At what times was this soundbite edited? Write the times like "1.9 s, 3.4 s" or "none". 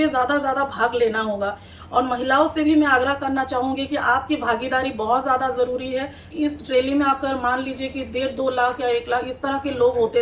6.3 s